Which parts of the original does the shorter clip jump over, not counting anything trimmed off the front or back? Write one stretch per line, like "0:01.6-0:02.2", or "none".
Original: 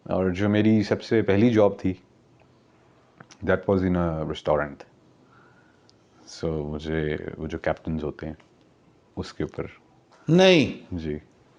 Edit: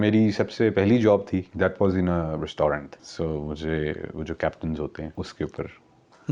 0:02.0-0:03.4
0:04.9-0:06.2
0:08.4-0:09.1